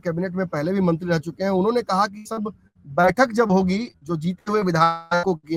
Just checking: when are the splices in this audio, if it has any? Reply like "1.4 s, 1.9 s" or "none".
none